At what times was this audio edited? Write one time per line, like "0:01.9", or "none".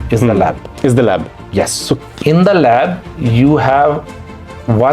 0:02.0